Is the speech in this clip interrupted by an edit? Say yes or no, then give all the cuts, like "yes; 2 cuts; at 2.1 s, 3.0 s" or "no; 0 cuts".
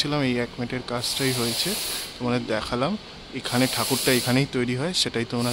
no; 0 cuts